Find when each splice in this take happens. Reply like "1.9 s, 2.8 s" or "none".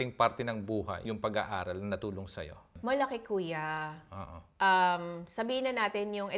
1.0 s, 2.7 s